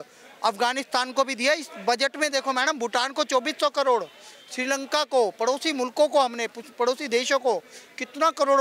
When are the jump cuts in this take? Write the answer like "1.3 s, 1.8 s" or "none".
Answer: none

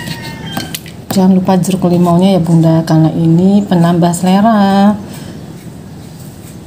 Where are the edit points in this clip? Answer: none

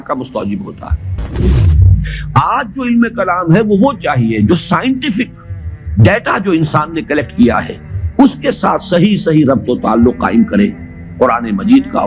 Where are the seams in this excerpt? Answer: 1.5 s

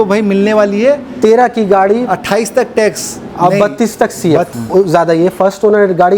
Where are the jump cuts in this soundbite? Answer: 4.5 s

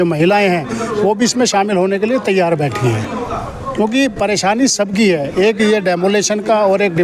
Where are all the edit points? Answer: none

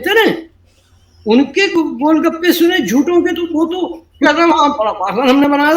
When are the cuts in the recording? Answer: none

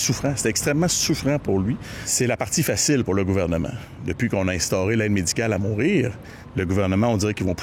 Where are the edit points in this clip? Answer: 2.0 s

